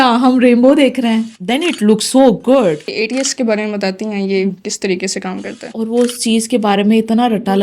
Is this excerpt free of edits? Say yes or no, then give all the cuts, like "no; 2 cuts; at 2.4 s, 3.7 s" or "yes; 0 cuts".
no; 3 cuts; at 1.3 s, 2.9 s, 5.7 s